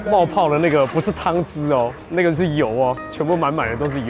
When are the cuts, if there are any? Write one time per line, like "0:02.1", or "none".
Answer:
0:02.0